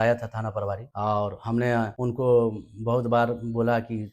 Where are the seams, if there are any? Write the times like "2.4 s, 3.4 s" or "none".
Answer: 0.9 s, 1.9 s